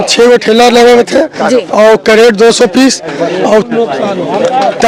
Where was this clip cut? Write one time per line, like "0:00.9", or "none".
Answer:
none